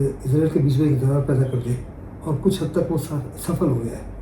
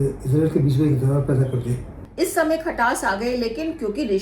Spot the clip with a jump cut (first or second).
second